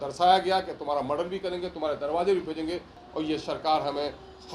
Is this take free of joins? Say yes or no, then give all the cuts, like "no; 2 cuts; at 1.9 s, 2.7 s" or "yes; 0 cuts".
no; 1 cut; at 3.0 s